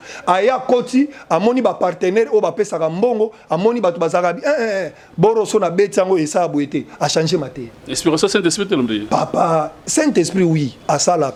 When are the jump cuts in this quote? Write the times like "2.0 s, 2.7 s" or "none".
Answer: none